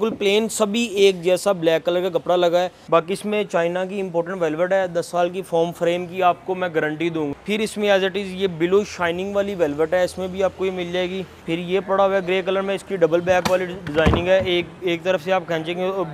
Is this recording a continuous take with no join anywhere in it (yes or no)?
no